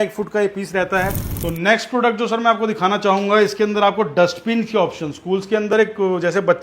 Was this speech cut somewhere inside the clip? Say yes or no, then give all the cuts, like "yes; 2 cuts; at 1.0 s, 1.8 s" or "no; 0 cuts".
yes; 1 cut; at 1.3 s